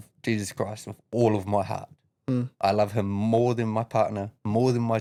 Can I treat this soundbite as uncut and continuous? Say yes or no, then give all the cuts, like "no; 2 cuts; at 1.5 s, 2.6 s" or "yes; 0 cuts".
yes; 0 cuts